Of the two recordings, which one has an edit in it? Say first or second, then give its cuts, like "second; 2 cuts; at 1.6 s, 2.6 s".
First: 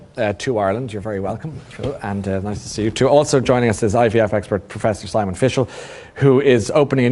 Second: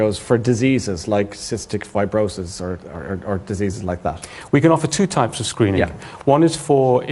second; 1 cut; at 1.6 s